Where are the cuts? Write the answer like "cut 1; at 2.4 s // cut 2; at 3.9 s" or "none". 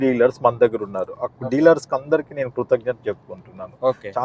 none